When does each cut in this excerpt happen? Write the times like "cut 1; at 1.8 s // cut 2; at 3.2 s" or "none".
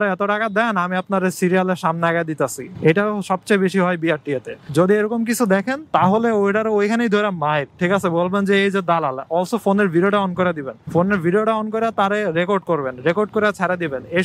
none